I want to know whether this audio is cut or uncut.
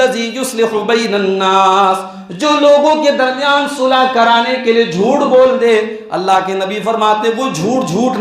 uncut